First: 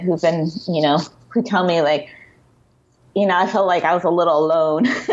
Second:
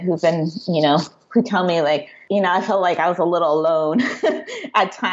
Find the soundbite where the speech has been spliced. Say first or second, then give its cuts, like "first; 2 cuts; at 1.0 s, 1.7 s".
second; 1 cut; at 2.1 s